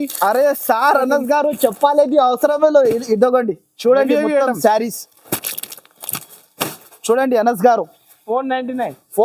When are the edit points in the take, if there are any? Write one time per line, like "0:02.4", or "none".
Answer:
none